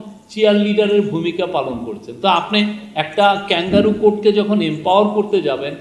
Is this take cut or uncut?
uncut